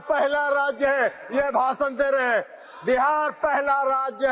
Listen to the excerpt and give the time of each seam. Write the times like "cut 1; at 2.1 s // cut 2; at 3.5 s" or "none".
none